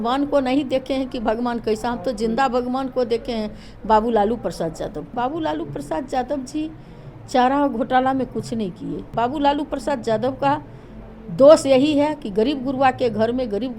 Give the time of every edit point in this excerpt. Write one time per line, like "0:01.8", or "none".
0:05.1
0:09.1

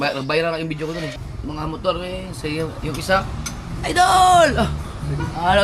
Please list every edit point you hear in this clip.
0:01.3

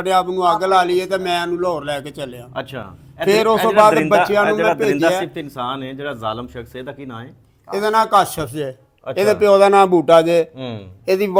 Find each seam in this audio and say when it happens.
none

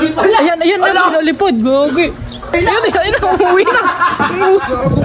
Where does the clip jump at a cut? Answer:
0:02.5

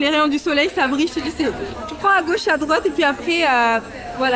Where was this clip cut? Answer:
0:01.8

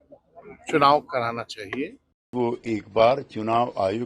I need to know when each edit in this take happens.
0:02.3

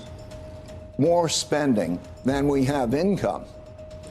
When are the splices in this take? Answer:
0:02.1

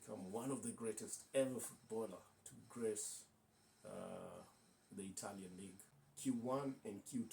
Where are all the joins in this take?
0:05.9

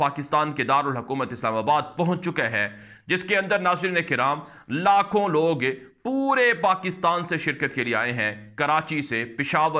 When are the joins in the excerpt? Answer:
none

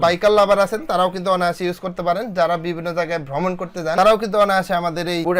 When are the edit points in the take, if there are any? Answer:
none

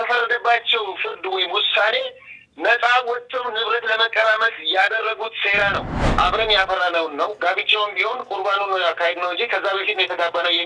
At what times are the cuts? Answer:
0:06.0

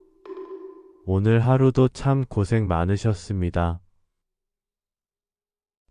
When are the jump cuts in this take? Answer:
0:00.9

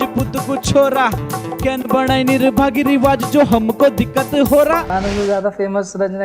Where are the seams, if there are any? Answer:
0:04.9

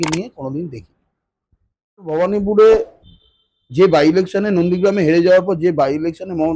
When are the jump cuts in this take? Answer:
0:02.1

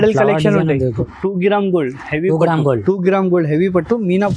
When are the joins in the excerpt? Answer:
0:01.0

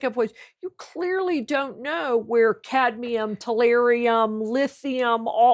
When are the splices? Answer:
none

